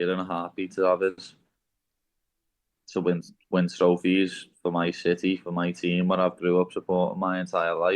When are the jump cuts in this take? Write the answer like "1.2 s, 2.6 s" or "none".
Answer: 3.3 s